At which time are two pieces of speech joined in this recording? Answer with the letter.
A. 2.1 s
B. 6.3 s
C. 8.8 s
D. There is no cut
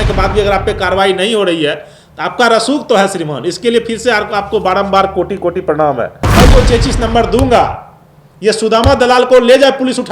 B